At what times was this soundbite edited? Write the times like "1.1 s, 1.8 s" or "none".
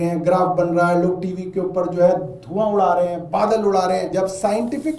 4.1 s